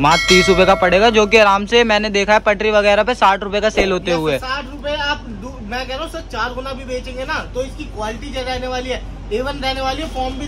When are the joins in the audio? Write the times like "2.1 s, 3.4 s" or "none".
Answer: none